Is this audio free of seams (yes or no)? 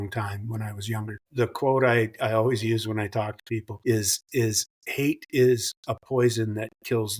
no